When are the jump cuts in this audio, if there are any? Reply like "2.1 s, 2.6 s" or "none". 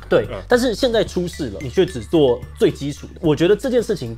1.6 s, 3.0 s